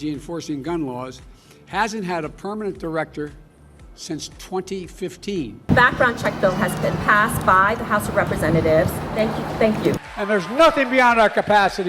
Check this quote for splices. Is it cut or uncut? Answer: cut